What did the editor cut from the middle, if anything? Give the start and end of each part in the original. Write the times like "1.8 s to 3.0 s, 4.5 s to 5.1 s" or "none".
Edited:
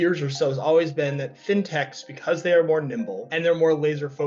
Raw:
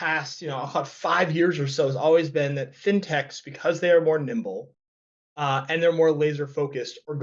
4.7 s to 5.7 s